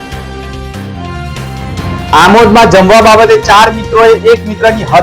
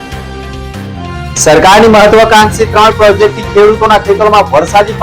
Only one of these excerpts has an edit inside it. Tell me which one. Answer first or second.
first